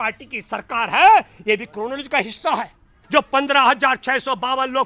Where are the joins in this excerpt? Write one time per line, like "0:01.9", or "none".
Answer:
0:02.9